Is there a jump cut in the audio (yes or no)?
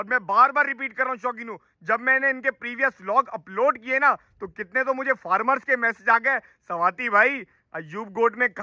no